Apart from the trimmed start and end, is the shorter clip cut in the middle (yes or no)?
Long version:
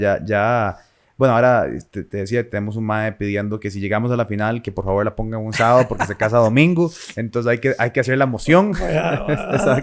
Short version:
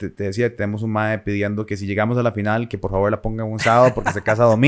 no